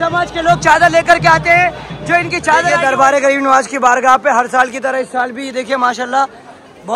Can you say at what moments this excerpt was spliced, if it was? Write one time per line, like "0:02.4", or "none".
0:02.8